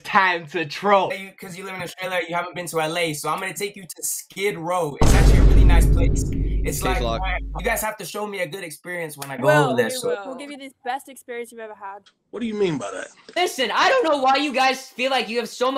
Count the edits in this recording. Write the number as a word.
three